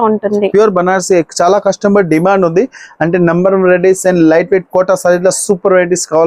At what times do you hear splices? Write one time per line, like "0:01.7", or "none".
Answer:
none